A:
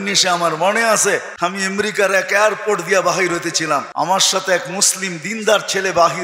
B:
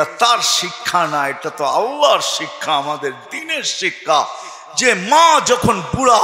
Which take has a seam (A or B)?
A